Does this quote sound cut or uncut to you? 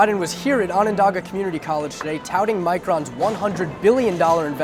uncut